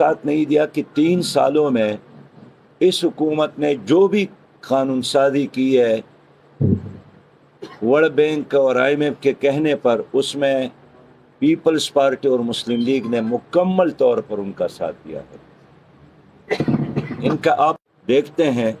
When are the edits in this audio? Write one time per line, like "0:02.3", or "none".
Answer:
0:17.9